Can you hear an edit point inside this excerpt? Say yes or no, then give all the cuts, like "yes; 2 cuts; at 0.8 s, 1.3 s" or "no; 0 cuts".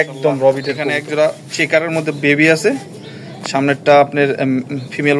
yes; 1 cut; at 1.1 s